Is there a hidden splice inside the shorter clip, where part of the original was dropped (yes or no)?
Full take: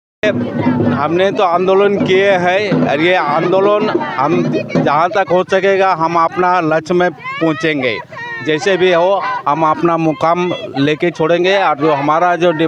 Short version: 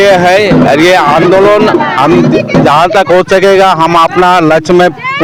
no